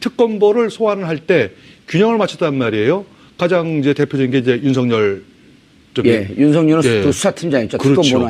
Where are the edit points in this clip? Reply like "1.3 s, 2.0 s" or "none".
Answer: 5.5 s